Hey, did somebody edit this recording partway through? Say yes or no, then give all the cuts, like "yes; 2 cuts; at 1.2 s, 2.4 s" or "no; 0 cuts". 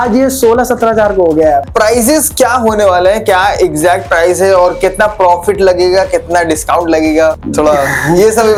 no; 0 cuts